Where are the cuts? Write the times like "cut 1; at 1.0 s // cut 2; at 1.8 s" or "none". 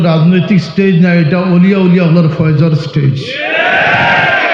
none